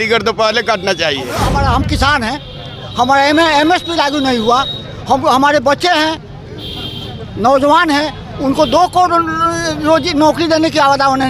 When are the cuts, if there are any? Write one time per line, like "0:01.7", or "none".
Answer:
0:01.4